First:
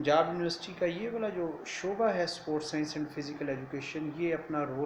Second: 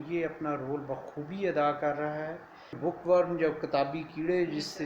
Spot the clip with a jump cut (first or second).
second